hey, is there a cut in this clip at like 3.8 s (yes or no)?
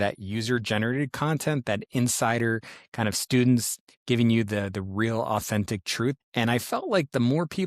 no